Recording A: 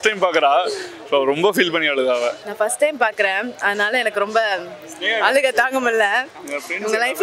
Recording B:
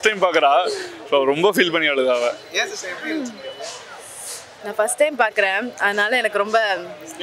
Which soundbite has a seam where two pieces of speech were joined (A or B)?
A